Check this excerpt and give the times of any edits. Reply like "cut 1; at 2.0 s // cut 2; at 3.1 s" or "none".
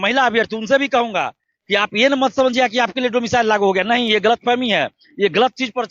none